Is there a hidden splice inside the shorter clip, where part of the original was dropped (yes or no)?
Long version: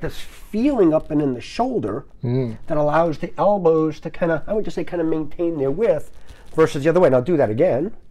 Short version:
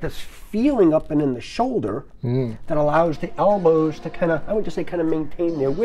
no